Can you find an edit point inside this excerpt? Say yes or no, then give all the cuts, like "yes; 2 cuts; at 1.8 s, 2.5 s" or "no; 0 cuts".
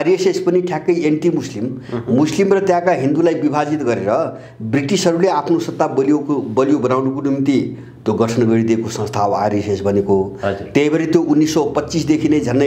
no; 0 cuts